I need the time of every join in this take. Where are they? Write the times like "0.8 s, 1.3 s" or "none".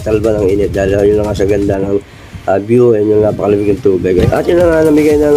4.2 s